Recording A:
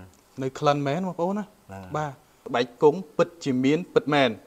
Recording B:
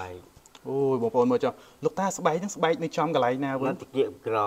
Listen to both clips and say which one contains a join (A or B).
A